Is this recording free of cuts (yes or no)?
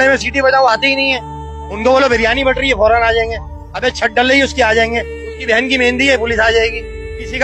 yes